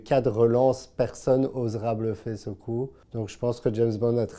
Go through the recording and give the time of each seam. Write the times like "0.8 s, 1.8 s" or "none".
none